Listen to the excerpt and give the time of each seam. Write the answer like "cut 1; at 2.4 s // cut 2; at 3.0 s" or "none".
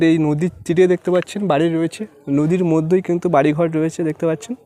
none